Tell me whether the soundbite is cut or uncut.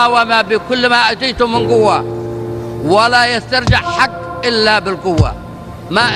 uncut